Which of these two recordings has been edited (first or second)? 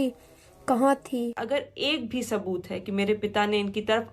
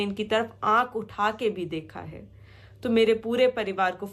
first